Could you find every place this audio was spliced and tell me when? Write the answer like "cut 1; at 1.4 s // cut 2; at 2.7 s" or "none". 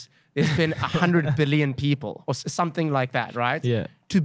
none